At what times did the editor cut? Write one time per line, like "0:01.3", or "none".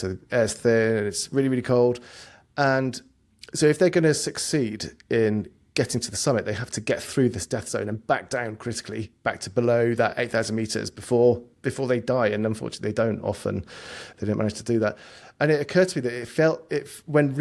none